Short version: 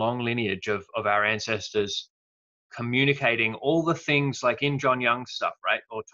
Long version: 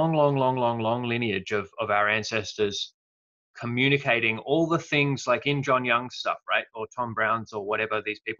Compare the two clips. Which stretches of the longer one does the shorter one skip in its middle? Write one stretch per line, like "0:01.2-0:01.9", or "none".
none